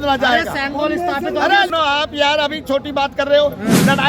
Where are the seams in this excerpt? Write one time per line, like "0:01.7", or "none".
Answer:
0:01.7